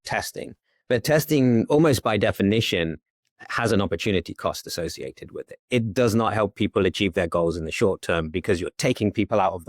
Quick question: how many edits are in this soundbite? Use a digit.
1